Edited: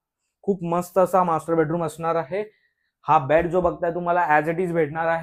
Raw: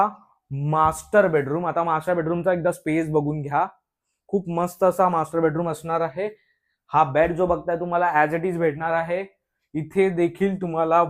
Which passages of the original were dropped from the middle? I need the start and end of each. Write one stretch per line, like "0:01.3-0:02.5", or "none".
none